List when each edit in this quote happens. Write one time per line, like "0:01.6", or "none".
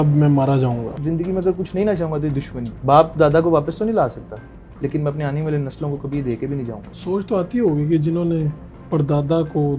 0:01.0
0:02.6
0:06.8

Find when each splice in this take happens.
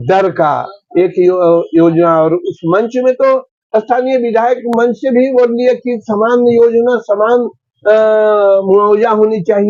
none

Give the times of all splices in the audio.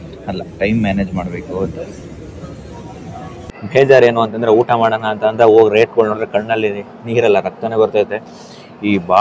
0:03.3

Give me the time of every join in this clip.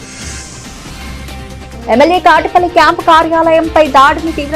0:01.5

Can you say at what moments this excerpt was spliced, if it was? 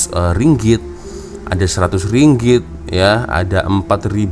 none

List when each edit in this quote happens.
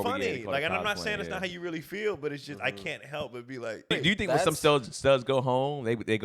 0:03.9

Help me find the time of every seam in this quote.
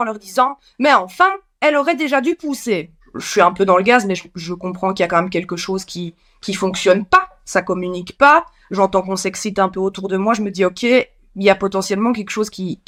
none

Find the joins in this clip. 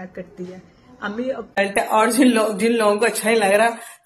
0:01.7

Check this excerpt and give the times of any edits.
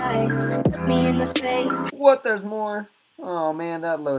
0:01.9

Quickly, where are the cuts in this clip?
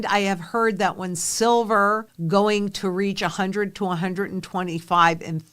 0:02.1

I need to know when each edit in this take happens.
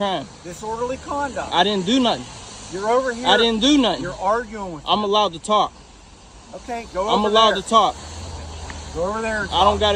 none

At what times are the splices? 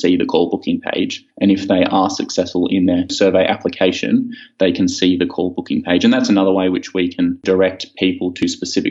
0:03.1
0:07.4

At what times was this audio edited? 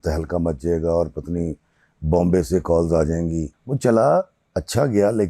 0:03.6

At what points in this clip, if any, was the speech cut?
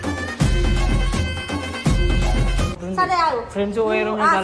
none

